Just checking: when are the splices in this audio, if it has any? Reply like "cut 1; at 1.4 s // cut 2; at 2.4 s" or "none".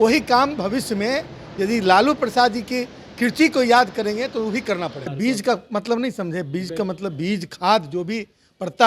cut 1; at 5.1 s